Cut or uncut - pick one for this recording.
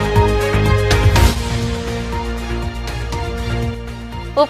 cut